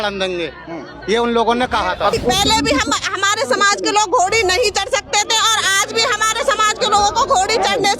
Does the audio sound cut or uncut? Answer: cut